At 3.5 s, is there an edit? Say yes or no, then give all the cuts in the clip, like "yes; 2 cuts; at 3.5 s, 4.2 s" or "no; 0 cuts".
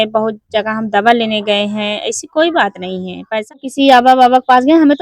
yes; 1 cut; at 3.5 s